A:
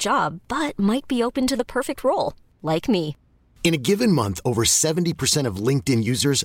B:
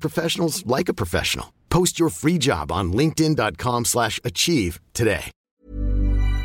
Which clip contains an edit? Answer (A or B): B